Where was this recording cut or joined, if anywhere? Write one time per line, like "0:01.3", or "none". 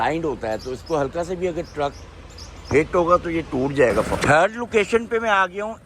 0:04.1